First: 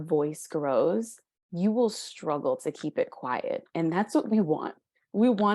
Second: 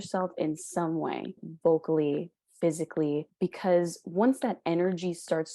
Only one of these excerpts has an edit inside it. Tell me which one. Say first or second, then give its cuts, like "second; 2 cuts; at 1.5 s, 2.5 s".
second; 2 cuts; at 1.4 s, 3.3 s